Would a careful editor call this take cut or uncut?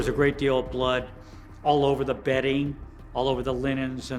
uncut